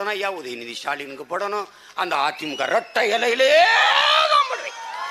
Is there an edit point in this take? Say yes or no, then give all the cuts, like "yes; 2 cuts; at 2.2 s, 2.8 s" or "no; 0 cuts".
no; 0 cuts